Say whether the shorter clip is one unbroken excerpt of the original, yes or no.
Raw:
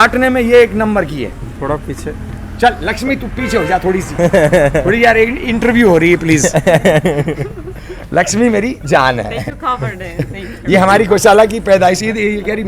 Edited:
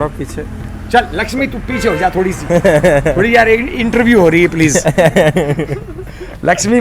yes